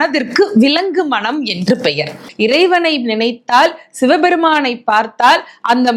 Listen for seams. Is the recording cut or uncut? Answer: cut